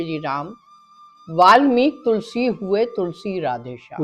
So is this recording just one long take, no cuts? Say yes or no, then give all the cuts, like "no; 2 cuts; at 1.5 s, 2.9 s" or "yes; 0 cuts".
yes; 0 cuts